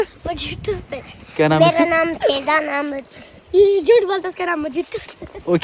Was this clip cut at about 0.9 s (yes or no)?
no